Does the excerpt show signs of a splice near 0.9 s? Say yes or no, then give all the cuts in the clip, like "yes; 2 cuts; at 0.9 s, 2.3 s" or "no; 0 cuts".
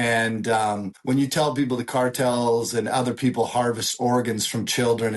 yes; 1 cut; at 0.9 s